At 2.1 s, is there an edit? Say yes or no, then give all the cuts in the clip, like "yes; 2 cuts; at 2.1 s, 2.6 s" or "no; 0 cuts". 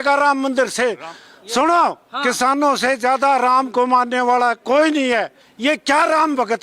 no; 1 cut; at 5.4 s